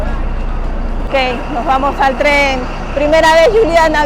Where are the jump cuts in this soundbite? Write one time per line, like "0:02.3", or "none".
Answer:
0:01.1